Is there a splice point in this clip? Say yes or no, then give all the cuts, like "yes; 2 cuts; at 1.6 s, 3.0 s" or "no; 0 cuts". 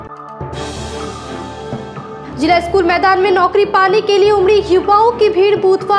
yes; 1 cut; at 1.8 s